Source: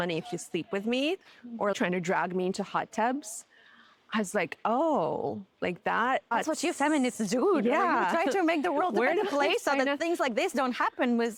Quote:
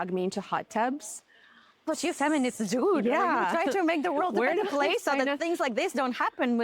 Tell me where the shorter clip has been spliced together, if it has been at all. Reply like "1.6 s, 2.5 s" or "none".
1.8 s